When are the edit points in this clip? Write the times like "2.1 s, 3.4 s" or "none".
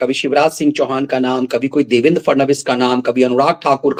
none